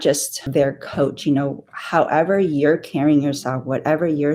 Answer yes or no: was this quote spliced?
no